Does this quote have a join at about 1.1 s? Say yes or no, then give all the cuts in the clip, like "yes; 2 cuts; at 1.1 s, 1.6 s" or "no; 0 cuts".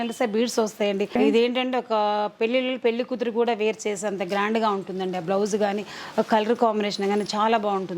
yes; 1 cut; at 1.1 s